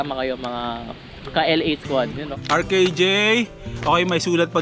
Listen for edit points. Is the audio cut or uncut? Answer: cut